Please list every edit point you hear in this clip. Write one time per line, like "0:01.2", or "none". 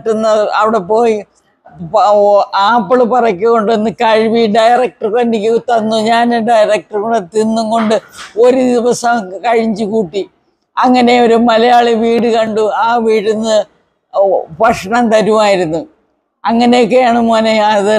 none